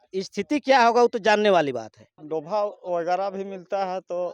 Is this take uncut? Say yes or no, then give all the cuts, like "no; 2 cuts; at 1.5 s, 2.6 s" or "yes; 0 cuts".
no; 1 cut; at 2.2 s